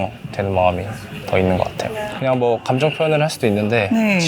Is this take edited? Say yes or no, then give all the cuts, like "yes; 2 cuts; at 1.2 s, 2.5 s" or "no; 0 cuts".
yes; 1 cut; at 2.1 s